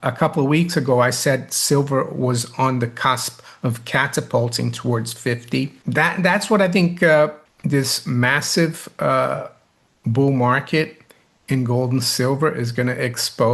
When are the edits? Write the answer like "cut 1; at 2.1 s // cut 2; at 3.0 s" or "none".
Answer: cut 1; at 5.8 s // cut 2; at 7.5 s